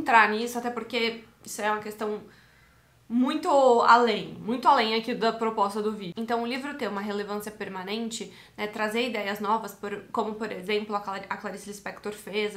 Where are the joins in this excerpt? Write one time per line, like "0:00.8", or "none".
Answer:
0:06.1